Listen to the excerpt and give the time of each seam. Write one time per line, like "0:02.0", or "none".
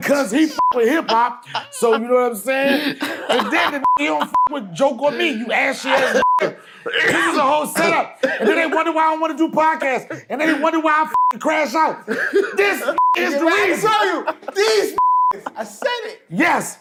none